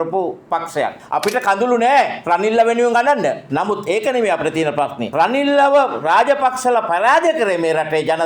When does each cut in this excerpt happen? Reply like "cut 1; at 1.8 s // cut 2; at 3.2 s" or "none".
cut 1; at 1.0 s // cut 2; at 3.4 s // cut 3; at 5.0 s

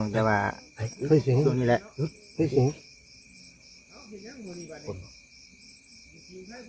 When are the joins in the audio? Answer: none

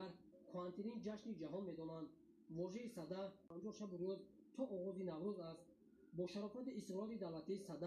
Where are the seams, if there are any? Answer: cut 1; at 3.5 s

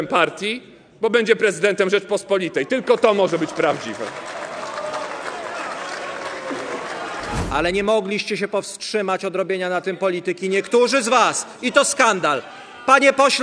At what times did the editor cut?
cut 1; at 7.3 s

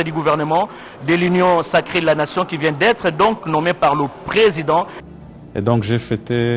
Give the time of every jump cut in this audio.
cut 1; at 5.0 s

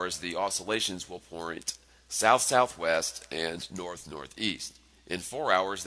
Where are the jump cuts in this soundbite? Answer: none

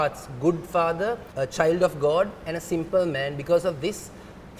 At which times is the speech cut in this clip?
cut 1; at 1.3 s

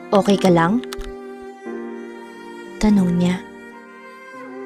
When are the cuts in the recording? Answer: cut 1; at 0.8 s // cut 2; at 2.3 s

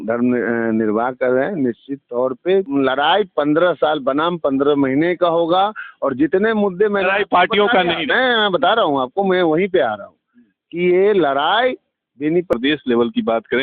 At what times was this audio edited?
cut 1; at 2.7 s // cut 2; at 12.5 s

